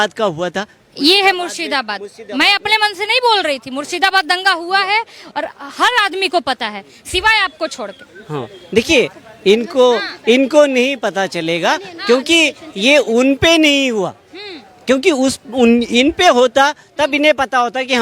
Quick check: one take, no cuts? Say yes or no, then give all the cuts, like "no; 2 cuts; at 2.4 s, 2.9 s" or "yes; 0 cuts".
yes; 0 cuts